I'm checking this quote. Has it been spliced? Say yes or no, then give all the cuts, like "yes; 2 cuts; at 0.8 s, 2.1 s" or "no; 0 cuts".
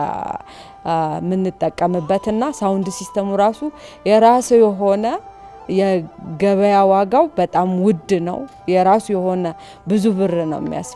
no; 0 cuts